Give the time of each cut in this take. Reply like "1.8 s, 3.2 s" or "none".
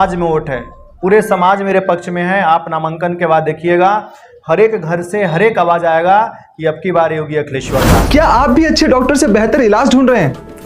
8.1 s